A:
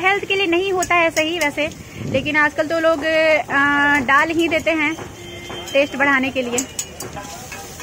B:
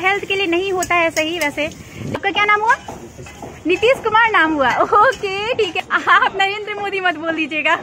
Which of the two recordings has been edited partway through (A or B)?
B